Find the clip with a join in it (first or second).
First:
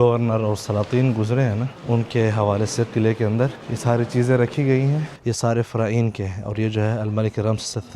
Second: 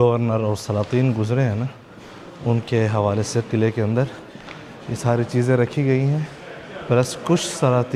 first